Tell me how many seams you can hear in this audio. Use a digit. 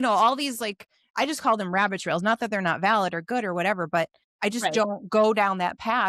1